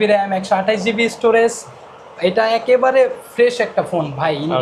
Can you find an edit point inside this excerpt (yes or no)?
no